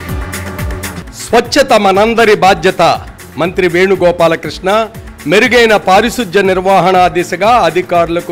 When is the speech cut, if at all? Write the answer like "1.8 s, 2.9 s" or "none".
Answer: 0.9 s